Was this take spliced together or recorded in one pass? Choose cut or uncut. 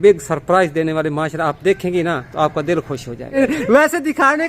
cut